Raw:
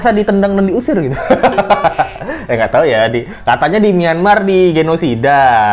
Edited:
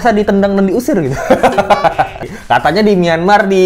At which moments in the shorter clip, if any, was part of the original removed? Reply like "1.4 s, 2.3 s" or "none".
2.3 s